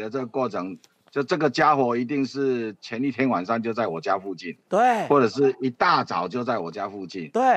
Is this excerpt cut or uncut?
uncut